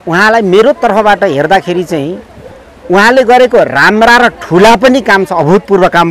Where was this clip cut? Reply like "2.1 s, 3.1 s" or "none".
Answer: none

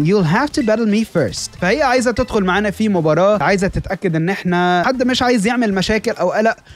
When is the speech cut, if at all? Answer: 1.5 s, 3.4 s, 4.8 s

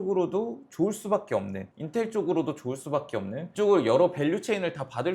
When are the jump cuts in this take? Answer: 3.5 s

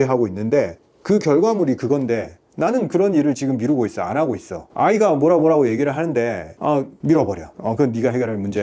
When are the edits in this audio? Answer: none

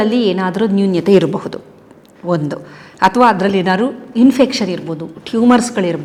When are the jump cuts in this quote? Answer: none

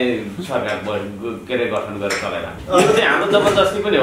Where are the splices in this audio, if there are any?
2.5 s

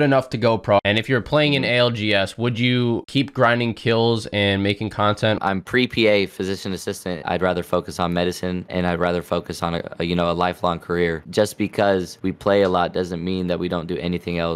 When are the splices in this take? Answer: 0.8 s, 5.4 s, 7.2 s, 11.2 s, 12.2 s

